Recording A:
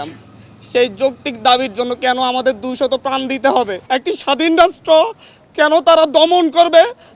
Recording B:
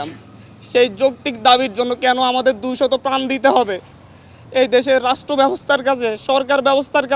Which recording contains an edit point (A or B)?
A